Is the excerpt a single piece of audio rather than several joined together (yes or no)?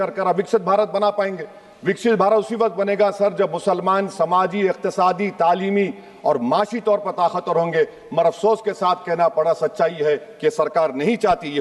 yes